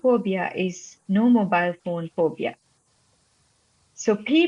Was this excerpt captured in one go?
yes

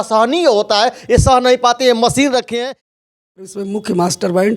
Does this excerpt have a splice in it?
yes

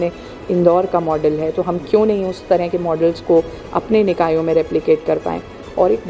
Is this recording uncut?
yes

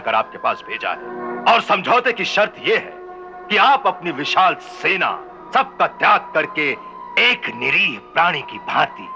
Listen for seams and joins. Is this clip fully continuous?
no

